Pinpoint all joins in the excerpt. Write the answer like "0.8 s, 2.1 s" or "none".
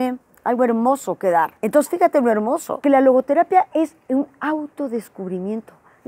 1.6 s, 2.8 s